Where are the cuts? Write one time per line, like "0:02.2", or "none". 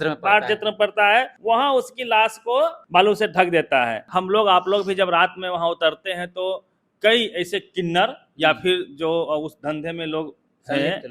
0:01.3
0:02.8
0:04.0

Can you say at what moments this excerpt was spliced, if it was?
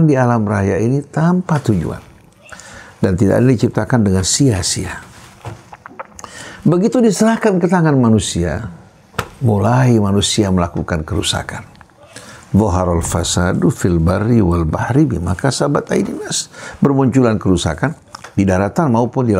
none

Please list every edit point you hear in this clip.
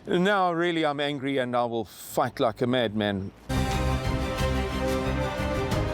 0:03.4

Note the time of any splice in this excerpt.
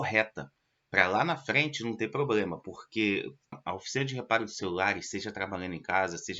0:03.6

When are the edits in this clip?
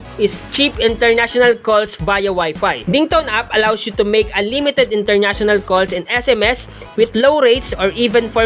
0:02.8

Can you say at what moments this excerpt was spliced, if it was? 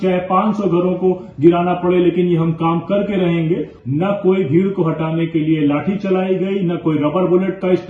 0:03.8

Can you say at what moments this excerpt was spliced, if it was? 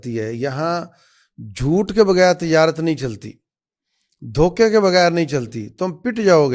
none

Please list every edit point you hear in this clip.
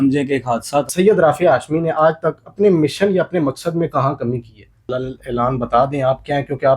0:00.9
0:04.9

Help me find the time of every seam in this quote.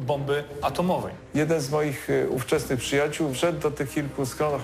0:01.2
0:03.4

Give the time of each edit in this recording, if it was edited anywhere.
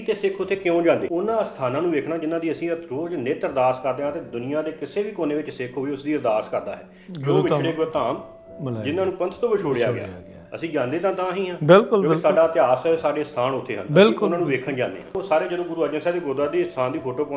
0:01.1
0:15.2

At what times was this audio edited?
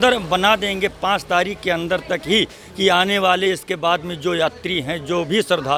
none

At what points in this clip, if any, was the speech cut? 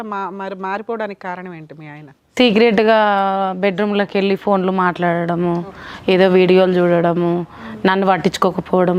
none

